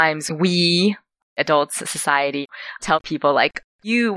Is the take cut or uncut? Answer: cut